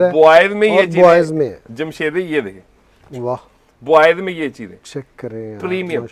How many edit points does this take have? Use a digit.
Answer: 0